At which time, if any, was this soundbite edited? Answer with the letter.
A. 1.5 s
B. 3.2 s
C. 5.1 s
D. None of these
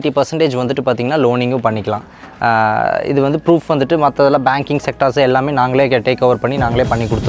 D